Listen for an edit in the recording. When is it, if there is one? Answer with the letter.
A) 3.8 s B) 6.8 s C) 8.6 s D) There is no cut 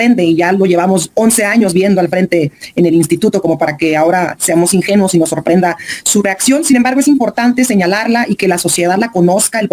D